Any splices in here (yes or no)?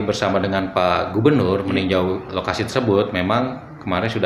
no